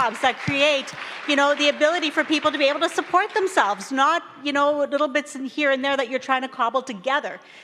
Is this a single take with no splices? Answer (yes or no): yes